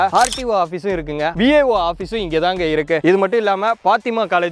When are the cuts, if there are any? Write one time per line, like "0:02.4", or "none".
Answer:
0:01.4